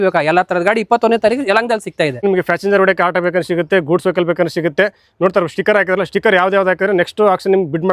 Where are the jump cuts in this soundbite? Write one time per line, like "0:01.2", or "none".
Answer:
0:02.2

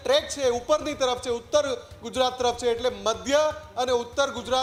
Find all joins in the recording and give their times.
none

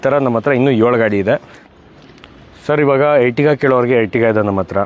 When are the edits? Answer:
0:01.5

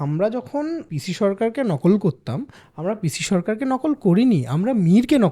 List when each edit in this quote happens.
0:00.9

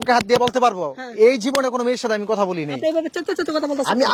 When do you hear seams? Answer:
none

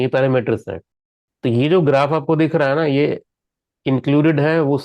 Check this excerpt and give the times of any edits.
none

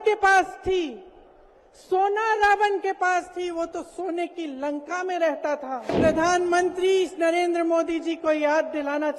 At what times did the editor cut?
0:06.0

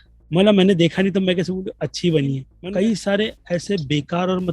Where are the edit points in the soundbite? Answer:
0:02.5

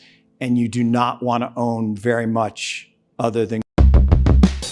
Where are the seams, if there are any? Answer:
0:03.6

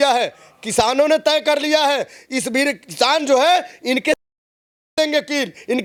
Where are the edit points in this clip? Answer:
none

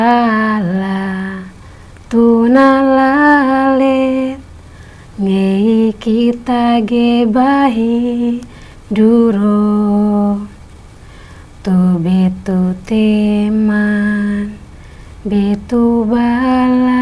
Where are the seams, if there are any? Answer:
none

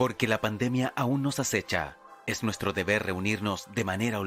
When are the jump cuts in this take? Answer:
none

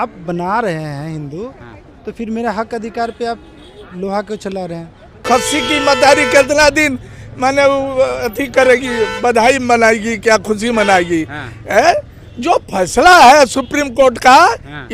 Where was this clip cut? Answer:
0:05.2

